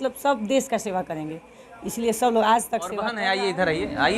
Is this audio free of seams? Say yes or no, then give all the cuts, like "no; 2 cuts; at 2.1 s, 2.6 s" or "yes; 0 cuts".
no; 1 cut; at 3.1 s